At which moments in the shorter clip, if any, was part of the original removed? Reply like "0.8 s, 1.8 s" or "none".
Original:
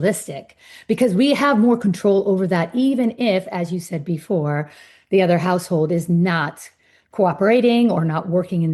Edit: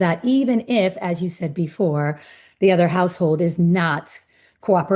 none

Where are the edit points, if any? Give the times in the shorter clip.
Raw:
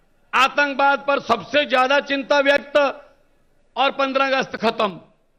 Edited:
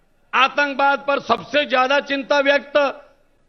none

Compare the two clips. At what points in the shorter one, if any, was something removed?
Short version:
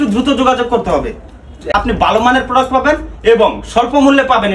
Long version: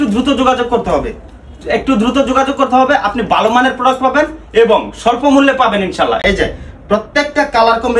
1.7 s

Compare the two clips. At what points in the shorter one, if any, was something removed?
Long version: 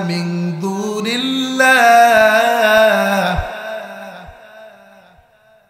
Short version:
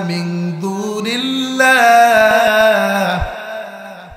2.4 s

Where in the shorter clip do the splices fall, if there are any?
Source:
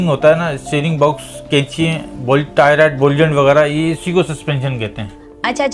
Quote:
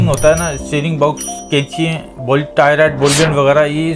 none

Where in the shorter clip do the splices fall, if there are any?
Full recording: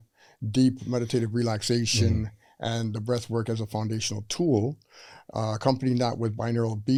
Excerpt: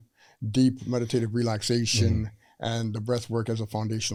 none

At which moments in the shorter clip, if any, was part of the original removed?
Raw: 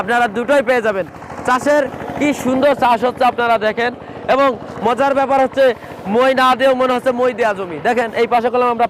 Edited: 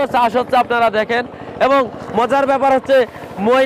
none

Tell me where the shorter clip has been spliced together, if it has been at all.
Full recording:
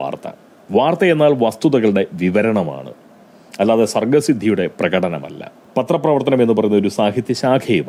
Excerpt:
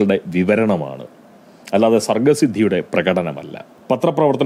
none

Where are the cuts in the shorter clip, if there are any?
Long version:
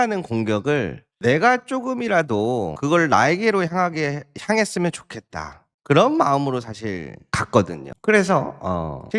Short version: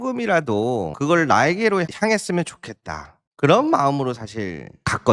1.9 s

